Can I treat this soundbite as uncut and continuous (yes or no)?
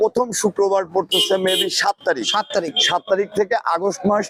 yes